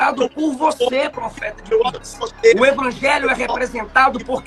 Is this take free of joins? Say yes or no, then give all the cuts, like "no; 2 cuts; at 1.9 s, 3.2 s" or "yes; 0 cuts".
yes; 0 cuts